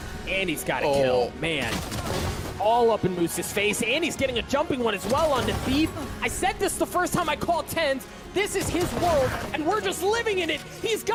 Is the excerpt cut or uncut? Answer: uncut